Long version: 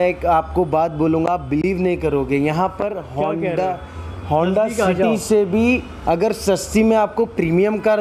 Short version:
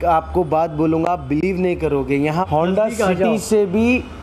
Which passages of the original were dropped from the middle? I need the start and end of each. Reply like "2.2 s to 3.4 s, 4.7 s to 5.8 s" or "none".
2.7 s to 4.3 s